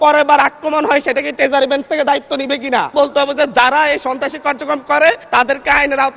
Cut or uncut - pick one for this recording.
cut